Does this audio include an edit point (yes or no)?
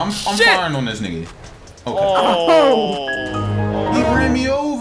no